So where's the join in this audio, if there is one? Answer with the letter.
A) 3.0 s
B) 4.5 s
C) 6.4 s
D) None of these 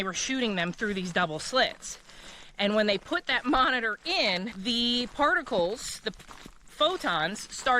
B